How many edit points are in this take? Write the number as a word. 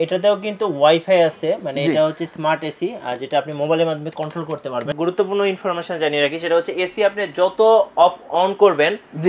one